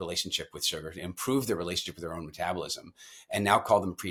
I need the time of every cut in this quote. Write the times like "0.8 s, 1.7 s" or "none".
none